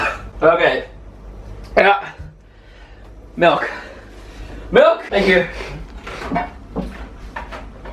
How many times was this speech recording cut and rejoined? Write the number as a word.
zero